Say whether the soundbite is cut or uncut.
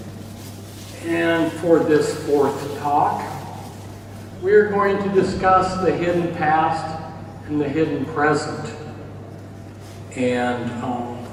uncut